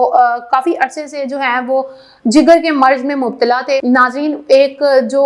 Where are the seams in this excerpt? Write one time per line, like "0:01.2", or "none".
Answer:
0:03.8